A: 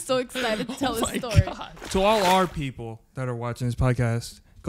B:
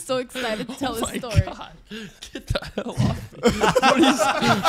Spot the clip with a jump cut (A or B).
A